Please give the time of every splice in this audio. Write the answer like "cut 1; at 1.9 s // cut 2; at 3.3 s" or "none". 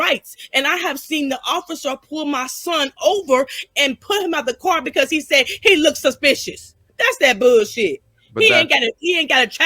none